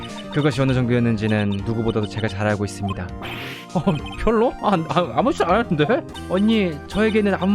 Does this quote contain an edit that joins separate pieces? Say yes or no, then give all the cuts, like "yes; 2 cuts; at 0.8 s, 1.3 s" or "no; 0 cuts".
yes; 1 cut; at 6.1 s